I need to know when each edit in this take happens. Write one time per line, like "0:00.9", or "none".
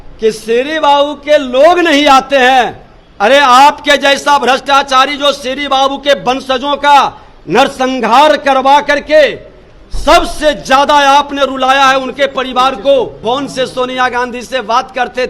0:13.2